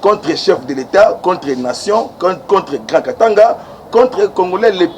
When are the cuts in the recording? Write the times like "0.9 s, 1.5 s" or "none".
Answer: none

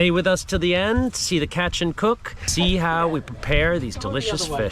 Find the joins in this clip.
2.4 s

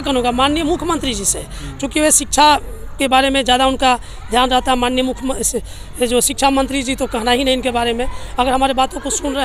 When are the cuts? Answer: none

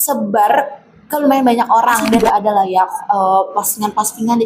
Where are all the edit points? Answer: 2.1 s

